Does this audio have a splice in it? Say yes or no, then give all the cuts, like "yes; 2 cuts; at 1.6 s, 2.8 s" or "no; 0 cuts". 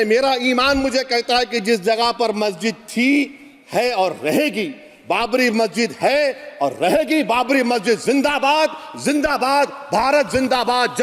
no; 0 cuts